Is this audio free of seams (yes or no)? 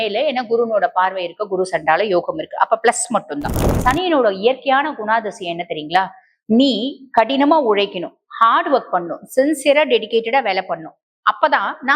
no